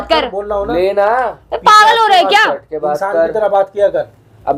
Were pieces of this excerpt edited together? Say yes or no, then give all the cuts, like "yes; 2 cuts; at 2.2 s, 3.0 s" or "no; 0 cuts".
no; 0 cuts